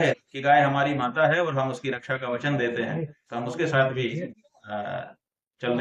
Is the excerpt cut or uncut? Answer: uncut